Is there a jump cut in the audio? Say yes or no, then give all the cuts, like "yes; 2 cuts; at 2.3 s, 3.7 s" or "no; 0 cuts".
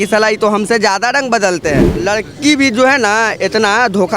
yes; 1 cut; at 2.0 s